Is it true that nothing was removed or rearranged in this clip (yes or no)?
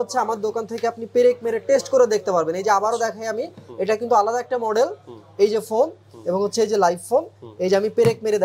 yes